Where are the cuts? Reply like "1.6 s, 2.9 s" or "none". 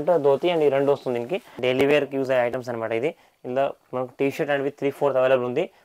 1.5 s

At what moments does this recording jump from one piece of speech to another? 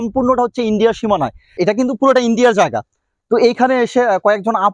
1.5 s

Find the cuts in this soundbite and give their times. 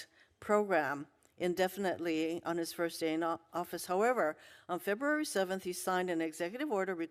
none

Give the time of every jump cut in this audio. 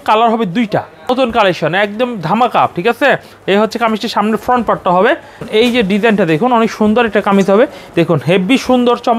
1.1 s, 5.4 s, 7.8 s

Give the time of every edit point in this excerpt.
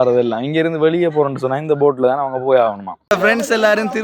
2.9 s

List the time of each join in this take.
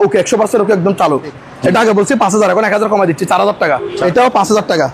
1.4 s, 3.9 s

